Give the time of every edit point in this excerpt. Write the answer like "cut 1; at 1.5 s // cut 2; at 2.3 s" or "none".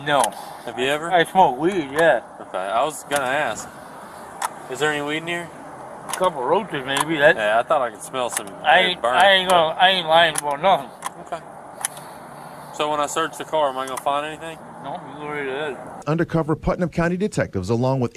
cut 1; at 15.9 s